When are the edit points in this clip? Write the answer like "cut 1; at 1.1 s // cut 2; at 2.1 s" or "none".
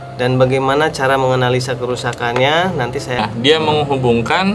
cut 1; at 3.2 s